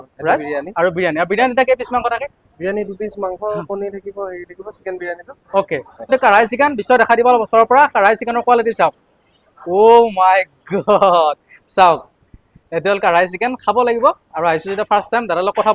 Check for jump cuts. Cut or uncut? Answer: uncut